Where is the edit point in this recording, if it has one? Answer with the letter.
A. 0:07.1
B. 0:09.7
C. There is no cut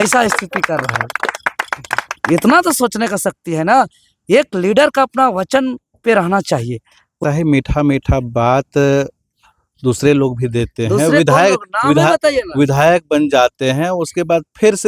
A